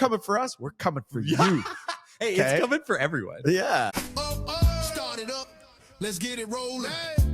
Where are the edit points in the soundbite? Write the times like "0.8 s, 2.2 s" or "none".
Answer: 3.9 s